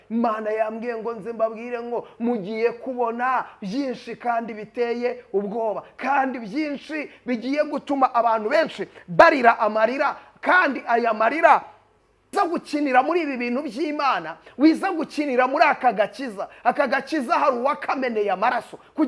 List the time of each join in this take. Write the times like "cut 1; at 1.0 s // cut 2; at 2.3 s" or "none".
cut 1; at 12.3 s